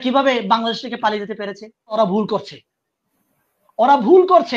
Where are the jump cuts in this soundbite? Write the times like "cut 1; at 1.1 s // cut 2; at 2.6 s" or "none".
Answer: cut 1; at 2.0 s